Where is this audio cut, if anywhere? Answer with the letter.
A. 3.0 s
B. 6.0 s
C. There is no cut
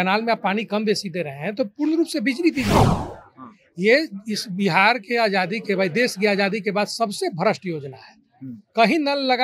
A